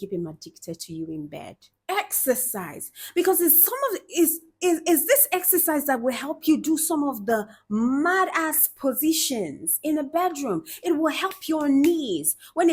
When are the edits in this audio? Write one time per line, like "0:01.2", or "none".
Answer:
0:01.6